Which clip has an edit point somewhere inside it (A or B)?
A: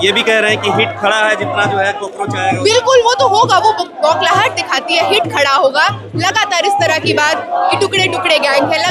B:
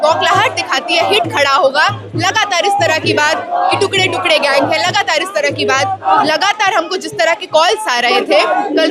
B